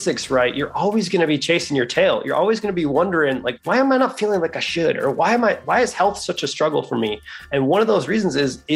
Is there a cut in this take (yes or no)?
no